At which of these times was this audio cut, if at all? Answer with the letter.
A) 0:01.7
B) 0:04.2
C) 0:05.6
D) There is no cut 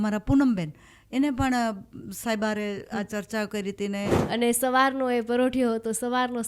B